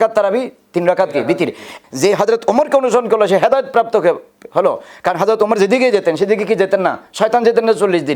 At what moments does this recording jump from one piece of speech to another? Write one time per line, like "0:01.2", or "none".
0:01.7

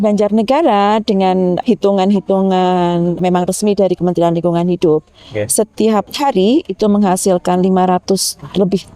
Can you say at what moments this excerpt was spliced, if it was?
0:01.6
0:03.2
0:06.1

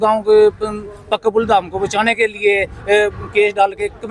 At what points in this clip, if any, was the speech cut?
none

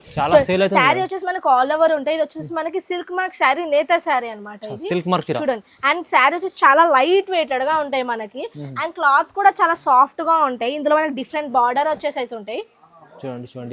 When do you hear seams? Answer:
none

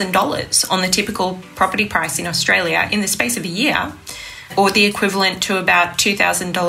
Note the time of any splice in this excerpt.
0:02.9
0:04.5

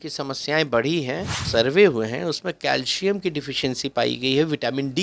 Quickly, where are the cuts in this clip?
0:01.4

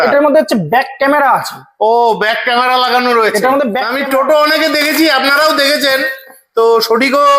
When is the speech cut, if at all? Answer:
0:03.9

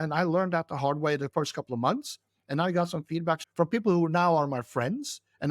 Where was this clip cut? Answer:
0:03.4

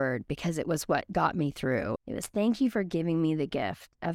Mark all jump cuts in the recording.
0:02.0

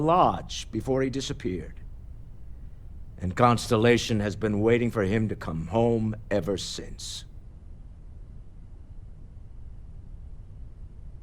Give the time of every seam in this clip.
0:01.7
0:03.2
0:07.0

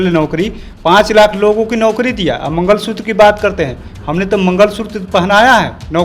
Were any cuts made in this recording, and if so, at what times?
none

